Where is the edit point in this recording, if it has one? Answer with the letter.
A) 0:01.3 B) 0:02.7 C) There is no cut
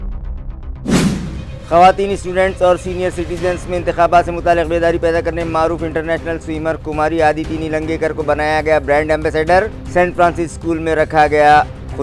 A